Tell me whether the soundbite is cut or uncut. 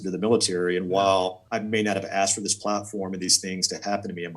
cut